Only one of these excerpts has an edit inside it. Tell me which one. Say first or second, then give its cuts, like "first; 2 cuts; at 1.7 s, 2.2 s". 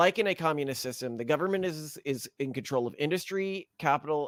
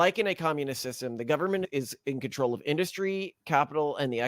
second; 1 cut; at 1.7 s